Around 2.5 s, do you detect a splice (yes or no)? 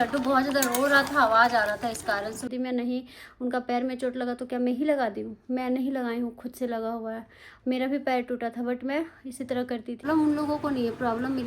yes